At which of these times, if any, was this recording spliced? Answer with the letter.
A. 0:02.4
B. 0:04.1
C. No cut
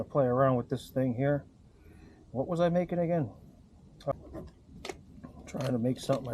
B